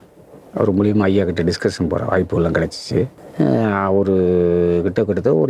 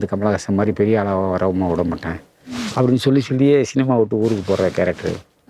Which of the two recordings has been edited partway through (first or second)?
first